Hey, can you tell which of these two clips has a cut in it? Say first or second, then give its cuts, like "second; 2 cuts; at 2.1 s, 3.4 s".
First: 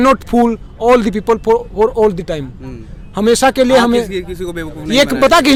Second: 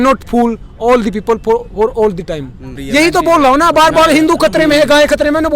second; 1 cut; at 2.8 s